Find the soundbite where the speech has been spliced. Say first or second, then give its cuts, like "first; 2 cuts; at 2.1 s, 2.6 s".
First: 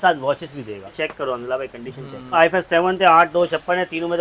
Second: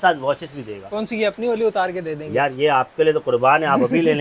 first; 2 cuts; at 0.9 s, 2.3 s